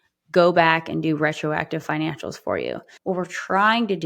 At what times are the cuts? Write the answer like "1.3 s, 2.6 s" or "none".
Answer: 2.9 s